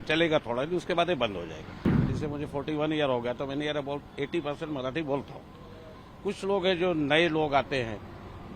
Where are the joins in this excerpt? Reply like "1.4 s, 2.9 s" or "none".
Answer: 2.1 s